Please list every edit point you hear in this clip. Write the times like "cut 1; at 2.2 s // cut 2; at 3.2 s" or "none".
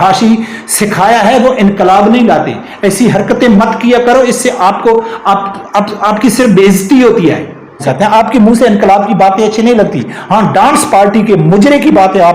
cut 1; at 7.8 s